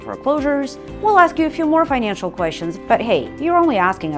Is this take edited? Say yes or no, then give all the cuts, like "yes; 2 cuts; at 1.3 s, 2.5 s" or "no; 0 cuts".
yes; 1 cut; at 2.7 s